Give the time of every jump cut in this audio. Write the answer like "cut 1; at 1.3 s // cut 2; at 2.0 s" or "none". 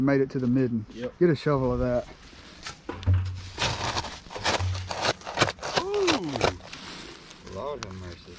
cut 1; at 6.7 s